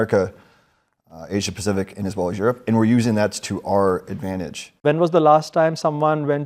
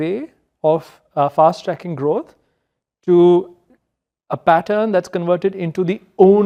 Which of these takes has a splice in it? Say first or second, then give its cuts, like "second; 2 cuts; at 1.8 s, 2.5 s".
first; 1 cut; at 4.8 s